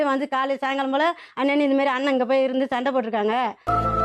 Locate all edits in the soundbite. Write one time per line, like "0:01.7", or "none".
none